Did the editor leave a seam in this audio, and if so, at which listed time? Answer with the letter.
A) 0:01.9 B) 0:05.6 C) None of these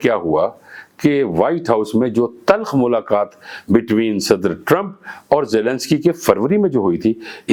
C